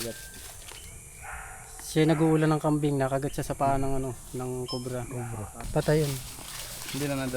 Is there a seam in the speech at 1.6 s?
no; 1 cut; at 5.6 s

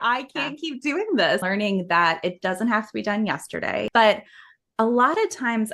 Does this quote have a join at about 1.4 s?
yes; 2 cuts; at 1.4 s, 3.9 s

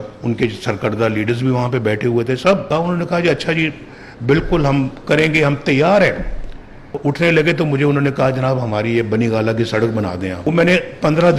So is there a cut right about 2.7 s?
yes; 3 cuts; at 2.7 s, 6.9 s, 10.5 s

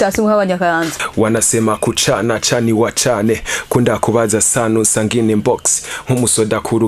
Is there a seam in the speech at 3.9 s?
no; 1 cut; at 1.0 s

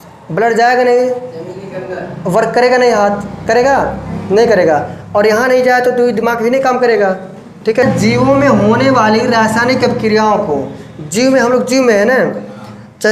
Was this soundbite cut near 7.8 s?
yes; 1 cut; at 7.8 s

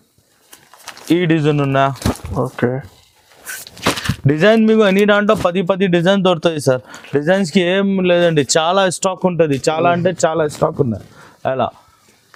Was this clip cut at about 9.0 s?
no; 0 cuts

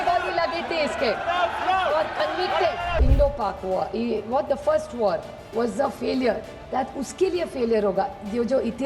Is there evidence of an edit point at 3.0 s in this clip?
yes; 1 cut; at 3.0 s

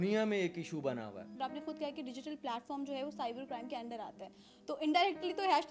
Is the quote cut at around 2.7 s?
no; 1 cut; at 1.4 s

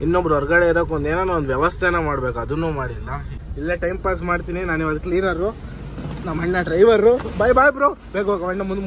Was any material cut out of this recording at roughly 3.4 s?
yes; 1 cut; at 3.4 s

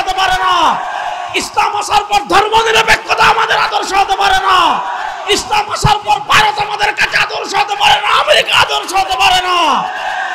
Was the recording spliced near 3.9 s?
no; 0 cuts

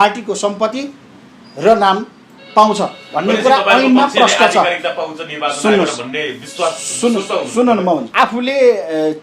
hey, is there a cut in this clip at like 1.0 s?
no; 1 cut; at 8.1 s

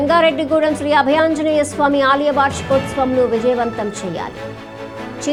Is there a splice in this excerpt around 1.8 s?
no; 0 cuts

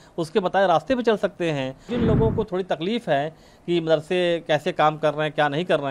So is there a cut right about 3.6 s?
no; 1 cut; at 1.9 s

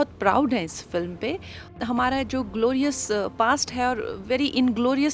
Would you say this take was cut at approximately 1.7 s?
yes; 1 cut; at 1.7 s

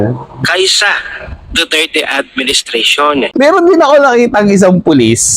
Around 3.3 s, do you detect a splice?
yes; 1 cut; at 3.3 s

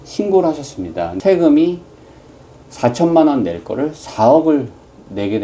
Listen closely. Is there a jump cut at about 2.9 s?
no; 1 cut; at 1.1 s

